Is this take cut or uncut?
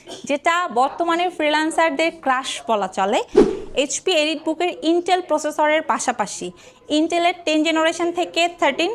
cut